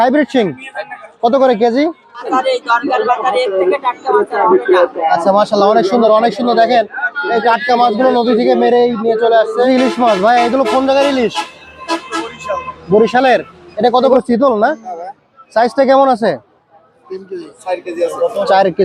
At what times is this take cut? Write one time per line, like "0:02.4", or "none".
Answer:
0:02.2
0:09.7
0:14.1